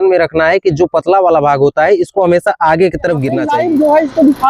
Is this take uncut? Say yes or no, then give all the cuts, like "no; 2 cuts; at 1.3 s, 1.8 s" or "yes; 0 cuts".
no; 1 cut; at 3.4 s